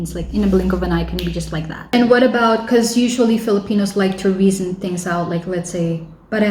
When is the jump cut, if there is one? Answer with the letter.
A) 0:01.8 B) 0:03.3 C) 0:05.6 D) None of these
A